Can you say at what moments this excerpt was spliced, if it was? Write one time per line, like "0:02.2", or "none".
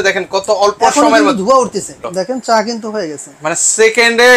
0:02.0